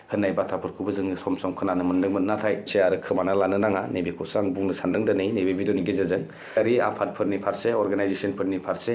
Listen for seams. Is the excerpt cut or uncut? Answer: cut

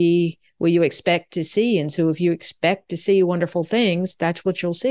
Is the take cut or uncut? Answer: uncut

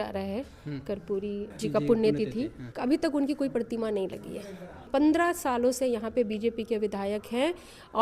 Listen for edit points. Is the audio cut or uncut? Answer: cut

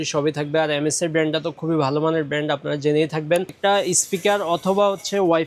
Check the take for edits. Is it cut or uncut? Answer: cut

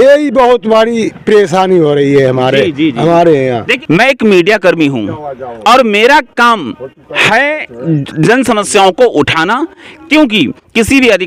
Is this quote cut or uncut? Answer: uncut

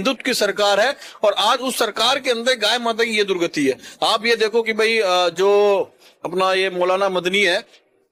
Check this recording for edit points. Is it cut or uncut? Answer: uncut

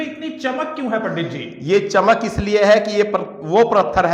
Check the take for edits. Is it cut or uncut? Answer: uncut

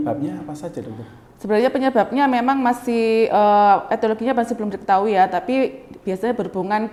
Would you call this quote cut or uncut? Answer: uncut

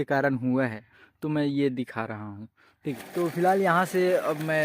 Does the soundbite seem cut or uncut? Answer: cut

